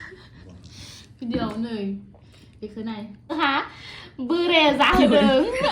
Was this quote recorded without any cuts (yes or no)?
no